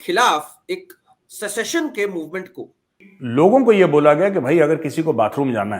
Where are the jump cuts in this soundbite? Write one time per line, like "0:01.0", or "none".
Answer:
0:03.1